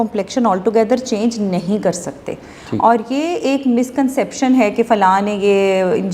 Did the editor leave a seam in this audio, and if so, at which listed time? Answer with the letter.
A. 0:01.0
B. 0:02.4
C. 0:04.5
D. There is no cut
D